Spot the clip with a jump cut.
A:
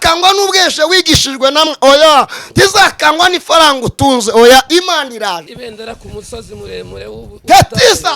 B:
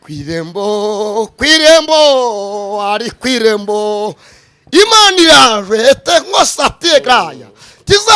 A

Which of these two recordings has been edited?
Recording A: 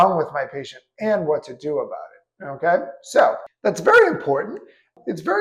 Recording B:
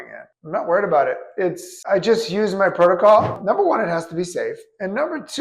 B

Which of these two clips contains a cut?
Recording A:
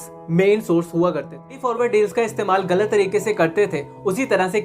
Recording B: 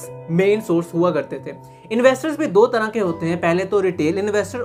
A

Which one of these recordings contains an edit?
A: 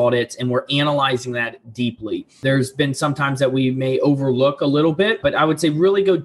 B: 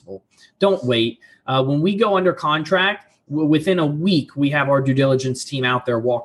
A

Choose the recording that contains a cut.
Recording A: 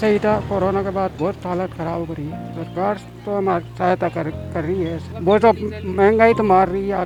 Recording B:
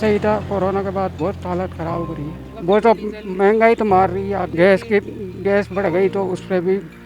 B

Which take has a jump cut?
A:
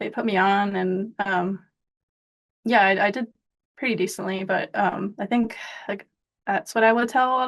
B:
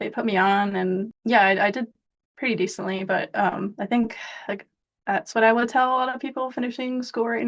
B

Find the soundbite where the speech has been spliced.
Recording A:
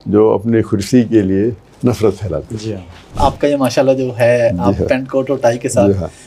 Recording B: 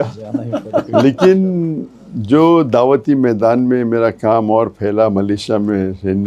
A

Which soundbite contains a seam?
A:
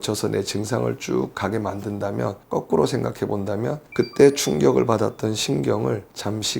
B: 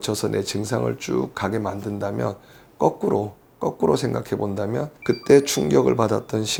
A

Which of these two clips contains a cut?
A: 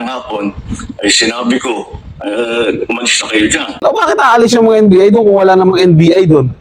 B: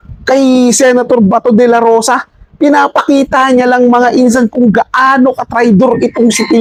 A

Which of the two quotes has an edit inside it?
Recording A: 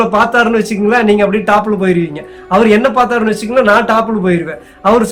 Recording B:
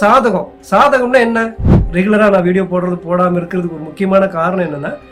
B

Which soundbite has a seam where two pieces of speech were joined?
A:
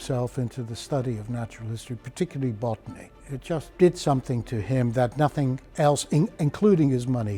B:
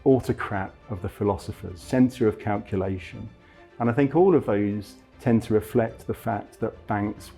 A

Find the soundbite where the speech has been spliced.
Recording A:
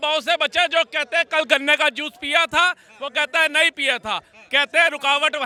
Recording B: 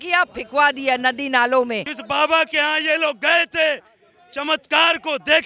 B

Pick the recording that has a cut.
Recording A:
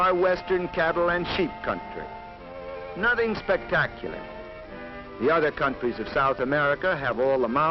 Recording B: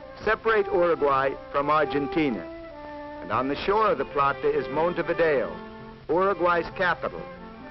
A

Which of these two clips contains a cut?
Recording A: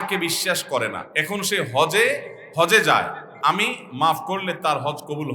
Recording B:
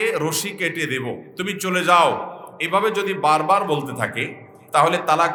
A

